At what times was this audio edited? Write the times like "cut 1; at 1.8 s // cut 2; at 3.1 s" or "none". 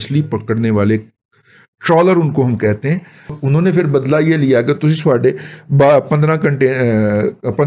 cut 1; at 3.4 s